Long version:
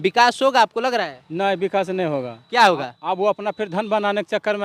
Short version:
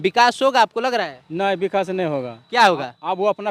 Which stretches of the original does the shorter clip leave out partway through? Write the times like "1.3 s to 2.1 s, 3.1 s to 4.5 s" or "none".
none